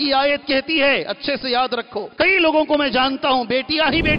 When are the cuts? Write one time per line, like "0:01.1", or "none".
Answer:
0:02.1